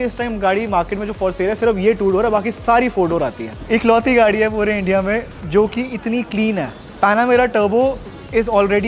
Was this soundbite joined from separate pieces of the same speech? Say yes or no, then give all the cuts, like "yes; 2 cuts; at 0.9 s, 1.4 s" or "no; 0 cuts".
yes; 1 cut; at 3.6 s